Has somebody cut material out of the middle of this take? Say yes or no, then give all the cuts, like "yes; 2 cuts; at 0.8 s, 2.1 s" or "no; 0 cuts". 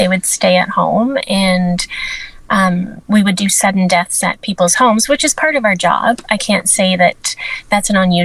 no; 0 cuts